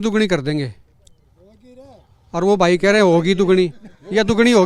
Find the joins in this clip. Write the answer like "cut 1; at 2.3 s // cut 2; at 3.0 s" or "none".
none